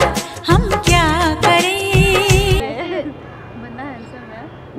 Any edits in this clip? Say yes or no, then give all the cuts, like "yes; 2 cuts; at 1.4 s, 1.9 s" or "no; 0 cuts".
yes; 1 cut; at 2.6 s